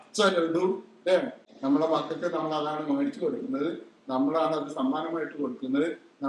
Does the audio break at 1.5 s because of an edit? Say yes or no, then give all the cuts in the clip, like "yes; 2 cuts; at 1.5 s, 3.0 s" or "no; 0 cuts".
yes; 1 cut; at 1.5 s